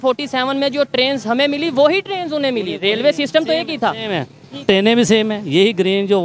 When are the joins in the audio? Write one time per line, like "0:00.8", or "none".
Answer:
none